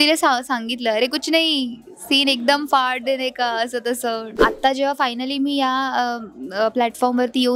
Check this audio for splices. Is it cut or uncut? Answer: cut